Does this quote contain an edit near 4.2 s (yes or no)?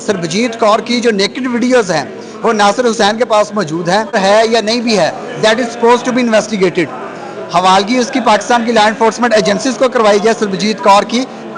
yes